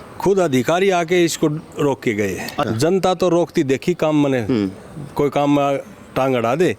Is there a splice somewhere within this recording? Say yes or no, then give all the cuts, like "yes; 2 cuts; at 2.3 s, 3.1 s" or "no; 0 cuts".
yes; 1 cut; at 2.6 s